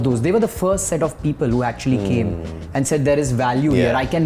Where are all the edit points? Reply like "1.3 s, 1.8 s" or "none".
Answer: none

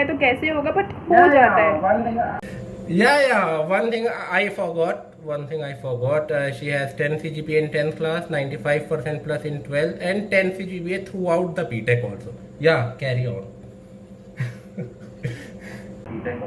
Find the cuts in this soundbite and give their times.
none

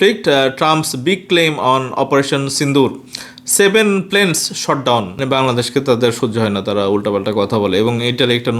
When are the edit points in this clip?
5.1 s

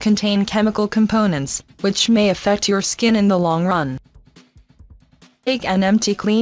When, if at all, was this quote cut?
none

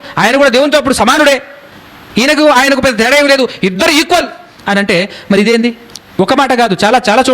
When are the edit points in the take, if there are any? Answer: none

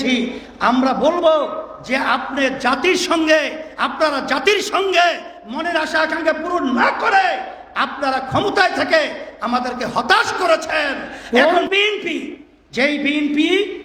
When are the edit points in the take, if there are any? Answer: 11.2 s

